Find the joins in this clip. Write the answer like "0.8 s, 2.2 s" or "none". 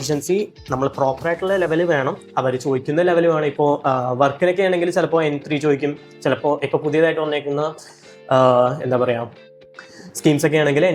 none